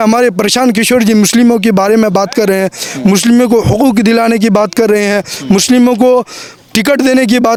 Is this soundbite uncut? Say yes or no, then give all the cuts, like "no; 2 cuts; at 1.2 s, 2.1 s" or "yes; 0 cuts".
yes; 0 cuts